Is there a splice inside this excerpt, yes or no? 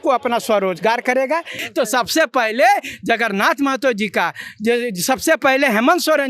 yes